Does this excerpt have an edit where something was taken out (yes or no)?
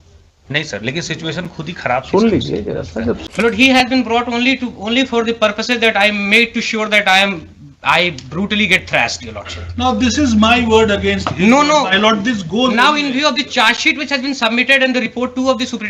yes